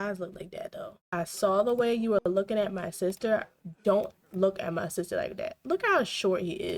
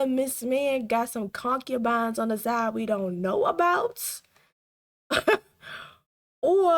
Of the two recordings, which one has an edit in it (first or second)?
first